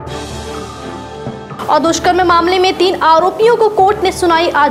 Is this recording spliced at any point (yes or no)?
no